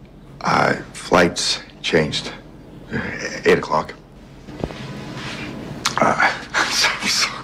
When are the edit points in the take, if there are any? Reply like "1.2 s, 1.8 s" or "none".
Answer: 4.6 s